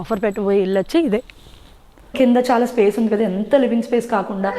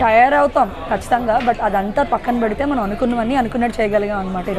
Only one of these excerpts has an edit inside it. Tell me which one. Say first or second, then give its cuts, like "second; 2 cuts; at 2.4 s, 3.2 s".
first; 1 cut; at 2.1 s